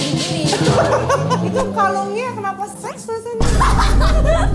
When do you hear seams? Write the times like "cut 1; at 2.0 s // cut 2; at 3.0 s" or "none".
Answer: none